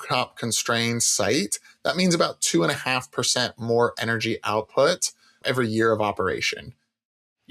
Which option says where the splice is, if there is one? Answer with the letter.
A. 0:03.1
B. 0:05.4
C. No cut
B